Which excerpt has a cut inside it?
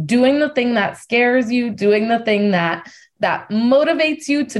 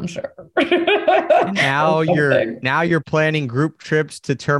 first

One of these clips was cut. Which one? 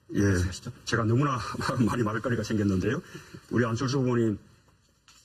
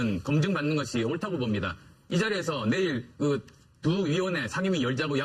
second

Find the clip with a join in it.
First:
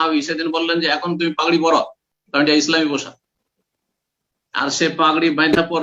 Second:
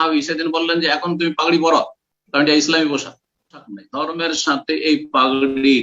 second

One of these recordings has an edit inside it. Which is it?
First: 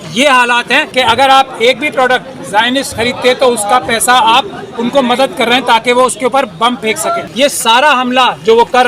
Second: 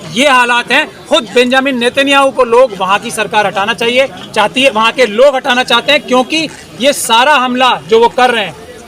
first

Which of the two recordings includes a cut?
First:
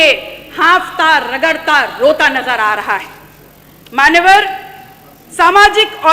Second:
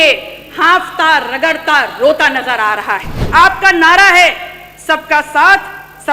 second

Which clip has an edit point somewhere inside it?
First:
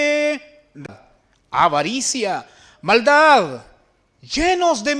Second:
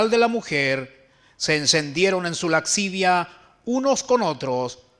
first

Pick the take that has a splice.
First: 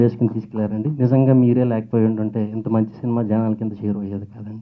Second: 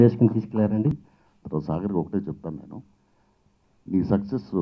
second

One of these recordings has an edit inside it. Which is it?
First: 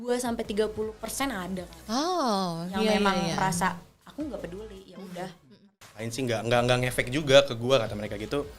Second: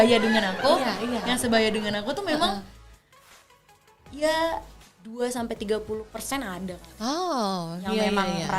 first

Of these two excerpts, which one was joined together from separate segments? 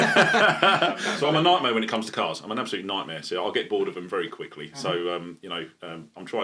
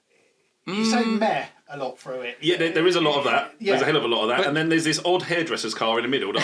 first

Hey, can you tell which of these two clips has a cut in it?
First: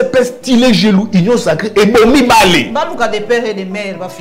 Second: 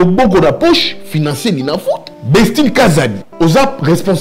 second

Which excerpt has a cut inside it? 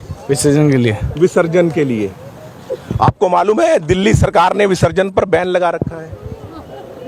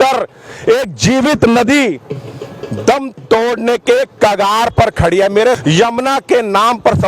second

